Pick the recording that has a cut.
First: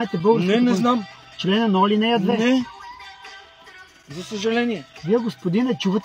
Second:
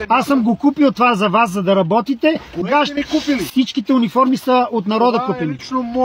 first; 3 cuts; at 1.1 s, 2.7 s, 4.9 s

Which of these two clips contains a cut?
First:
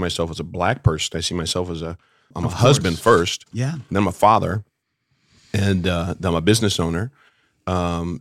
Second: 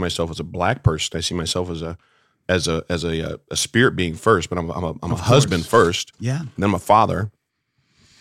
first; 1 cut; at 2.3 s

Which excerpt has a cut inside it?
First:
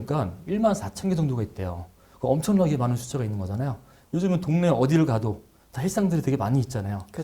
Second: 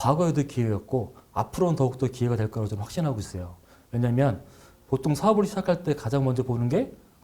first; 1 cut; at 3.9 s

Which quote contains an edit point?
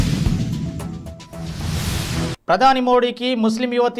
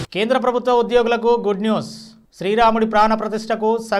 first; 1 cut; at 2.4 s

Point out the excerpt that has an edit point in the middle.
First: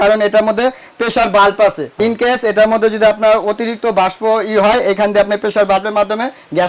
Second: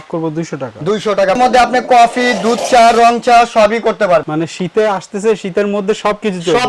second; 1 cut; at 1.4 s

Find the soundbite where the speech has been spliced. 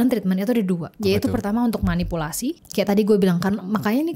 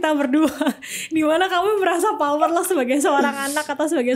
first; 2 cuts; at 0.9 s, 2.6 s

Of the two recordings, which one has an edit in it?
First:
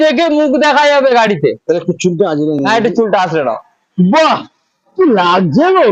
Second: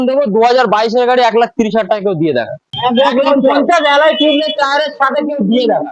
second; 1 cut; at 2.7 s

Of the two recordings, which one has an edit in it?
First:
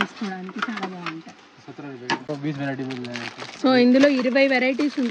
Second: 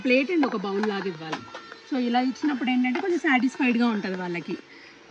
first; 1 cut; at 2.3 s

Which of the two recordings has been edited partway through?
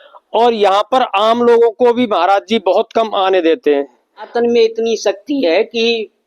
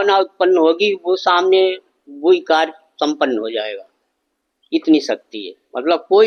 first; 1 cut; at 4.3 s

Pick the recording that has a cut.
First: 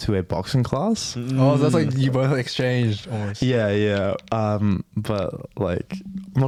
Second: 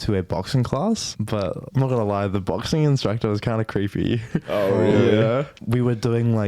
second; 2 cuts; at 1.2 s, 5.6 s

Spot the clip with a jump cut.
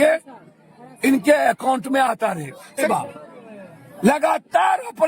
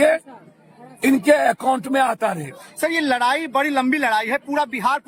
first; 1 cut; at 2.9 s

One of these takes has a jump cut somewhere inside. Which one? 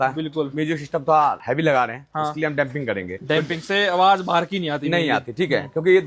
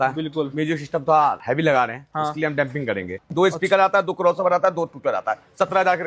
second; 1 cut; at 3.2 s

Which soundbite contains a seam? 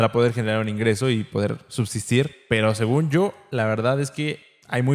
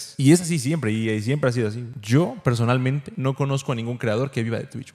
second; 1 cut; at 1.9 s

